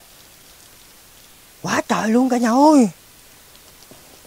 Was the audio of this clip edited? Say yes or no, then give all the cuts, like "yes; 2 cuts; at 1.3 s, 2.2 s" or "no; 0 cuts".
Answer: no; 0 cuts